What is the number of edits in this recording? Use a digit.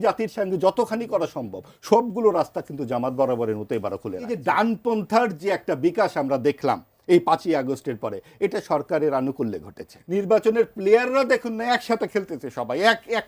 2